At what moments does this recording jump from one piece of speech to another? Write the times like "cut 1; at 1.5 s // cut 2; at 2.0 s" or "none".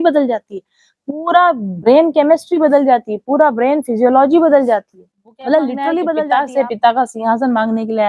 cut 1; at 6.2 s